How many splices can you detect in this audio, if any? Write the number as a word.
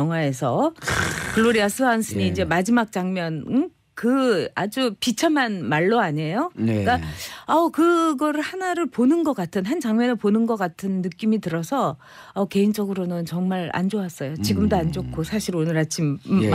one